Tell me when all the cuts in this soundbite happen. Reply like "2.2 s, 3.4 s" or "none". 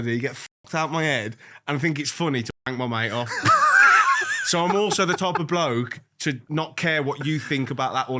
none